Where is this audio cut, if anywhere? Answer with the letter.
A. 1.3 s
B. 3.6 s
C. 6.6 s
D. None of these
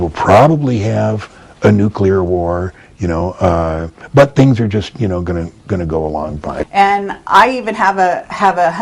C